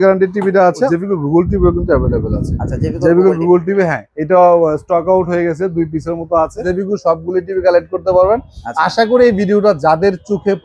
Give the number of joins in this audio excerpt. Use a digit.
2